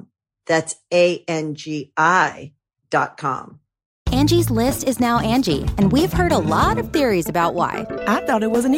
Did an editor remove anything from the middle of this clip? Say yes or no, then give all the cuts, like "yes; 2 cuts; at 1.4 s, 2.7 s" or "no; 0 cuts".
yes; 1 cut; at 3.9 s